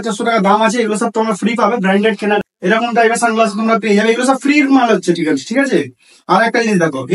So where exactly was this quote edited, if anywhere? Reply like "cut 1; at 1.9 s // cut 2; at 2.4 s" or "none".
cut 1; at 2.4 s